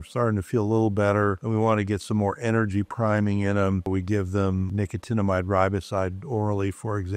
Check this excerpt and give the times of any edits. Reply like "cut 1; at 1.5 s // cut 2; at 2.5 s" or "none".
cut 1; at 3.9 s // cut 2; at 4.7 s